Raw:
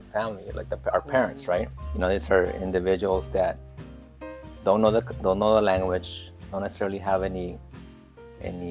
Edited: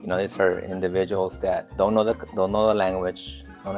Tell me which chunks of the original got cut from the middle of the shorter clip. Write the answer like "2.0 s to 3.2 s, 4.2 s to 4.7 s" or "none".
3.6 s to 4.5 s